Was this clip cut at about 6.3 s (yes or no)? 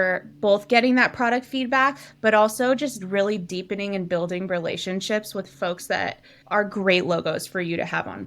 yes